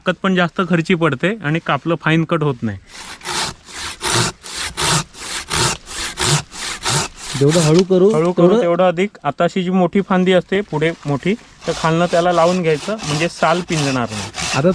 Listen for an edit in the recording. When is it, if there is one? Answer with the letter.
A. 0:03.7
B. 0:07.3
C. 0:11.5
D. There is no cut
D